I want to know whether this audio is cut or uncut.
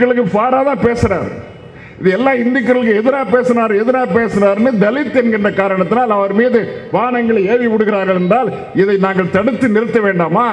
uncut